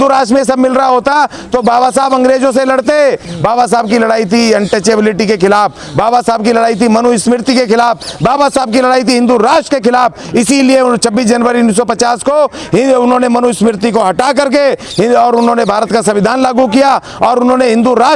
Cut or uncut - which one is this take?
cut